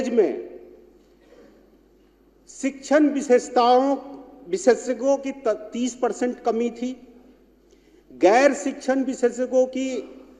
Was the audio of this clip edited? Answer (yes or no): no